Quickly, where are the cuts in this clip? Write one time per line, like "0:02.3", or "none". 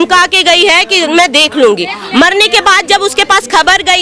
none